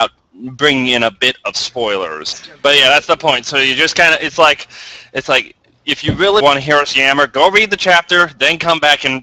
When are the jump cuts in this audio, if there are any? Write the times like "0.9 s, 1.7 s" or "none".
2.4 s, 6.4 s